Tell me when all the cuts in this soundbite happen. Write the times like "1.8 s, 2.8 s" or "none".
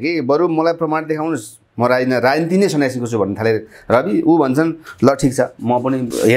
none